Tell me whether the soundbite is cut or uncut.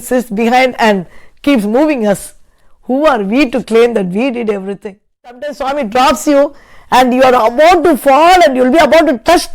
cut